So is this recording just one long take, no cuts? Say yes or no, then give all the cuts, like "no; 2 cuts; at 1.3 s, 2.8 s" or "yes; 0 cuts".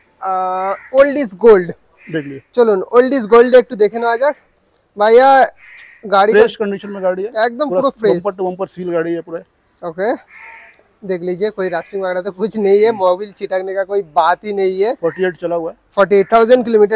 yes; 0 cuts